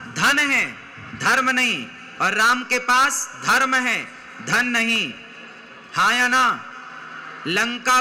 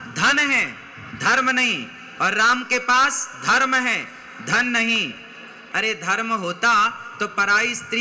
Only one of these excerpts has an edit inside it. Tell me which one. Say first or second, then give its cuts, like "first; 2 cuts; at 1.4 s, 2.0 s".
second; 1 cut; at 5.6 s